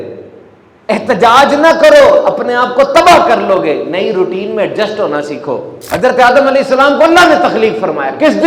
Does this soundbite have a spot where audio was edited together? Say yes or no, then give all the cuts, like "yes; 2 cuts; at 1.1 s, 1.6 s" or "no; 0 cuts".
yes; 1 cut; at 5.7 s